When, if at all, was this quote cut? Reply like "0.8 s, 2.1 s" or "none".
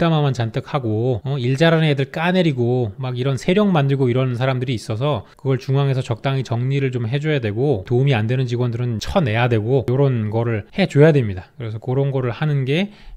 none